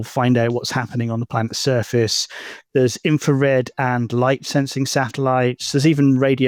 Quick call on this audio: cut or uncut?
uncut